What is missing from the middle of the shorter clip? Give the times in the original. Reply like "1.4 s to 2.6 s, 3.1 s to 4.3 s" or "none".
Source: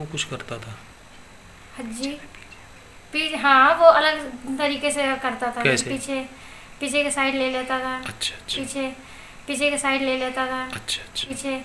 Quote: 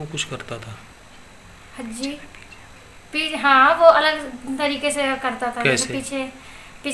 5.8 s to 8.5 s